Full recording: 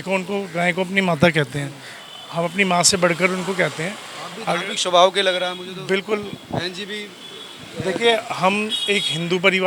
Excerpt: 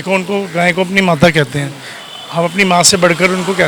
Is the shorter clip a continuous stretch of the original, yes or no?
yes